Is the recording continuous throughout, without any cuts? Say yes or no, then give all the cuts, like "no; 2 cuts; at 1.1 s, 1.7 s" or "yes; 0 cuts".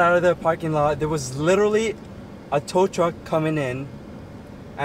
yes; 0 cuts